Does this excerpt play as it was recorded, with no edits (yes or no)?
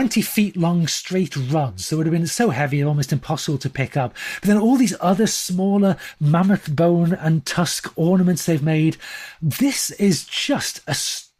yes